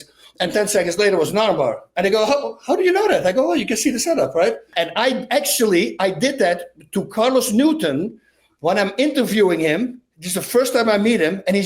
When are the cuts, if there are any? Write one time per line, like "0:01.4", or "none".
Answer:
0:04.6